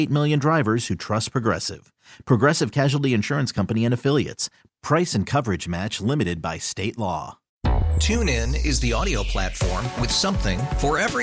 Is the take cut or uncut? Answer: cut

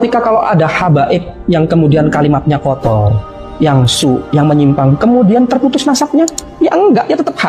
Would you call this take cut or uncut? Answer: uncut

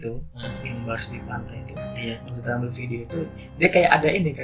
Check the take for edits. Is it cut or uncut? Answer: uncut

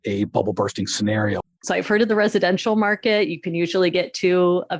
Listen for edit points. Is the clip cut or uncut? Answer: cut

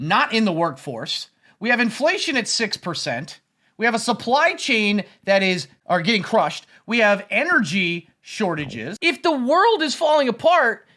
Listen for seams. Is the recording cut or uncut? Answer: cut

